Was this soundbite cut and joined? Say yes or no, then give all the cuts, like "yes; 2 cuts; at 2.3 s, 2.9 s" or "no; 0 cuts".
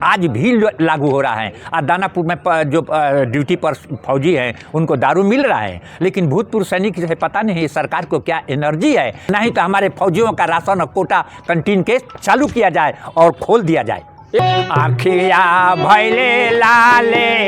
yes; 2 cuts; at 9.2 s, 14.4 s